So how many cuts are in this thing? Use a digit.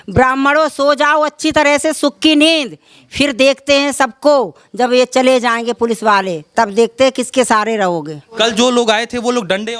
1